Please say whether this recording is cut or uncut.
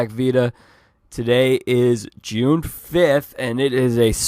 uncut